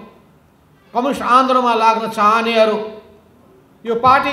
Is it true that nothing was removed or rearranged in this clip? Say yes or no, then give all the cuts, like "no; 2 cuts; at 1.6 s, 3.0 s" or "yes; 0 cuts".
yes; 0 cuts